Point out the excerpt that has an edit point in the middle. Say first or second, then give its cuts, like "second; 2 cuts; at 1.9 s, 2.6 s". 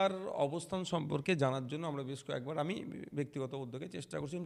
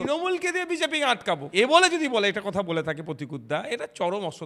second; 1 cut; at 1.5 s